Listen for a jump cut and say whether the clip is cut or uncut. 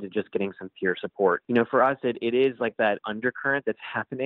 cut